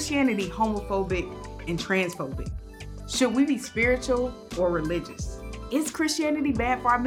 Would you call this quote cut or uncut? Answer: uncut